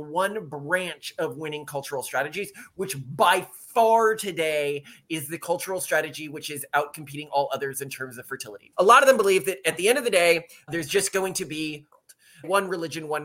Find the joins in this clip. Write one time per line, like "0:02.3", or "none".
0:08.6
0:12.1